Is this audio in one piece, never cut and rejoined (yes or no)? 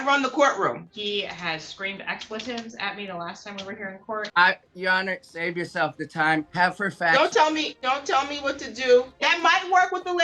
no